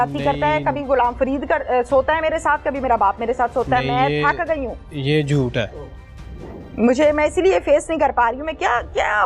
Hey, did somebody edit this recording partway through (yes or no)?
no